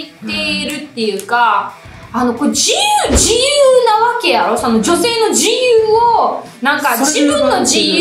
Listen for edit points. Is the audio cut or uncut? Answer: uncut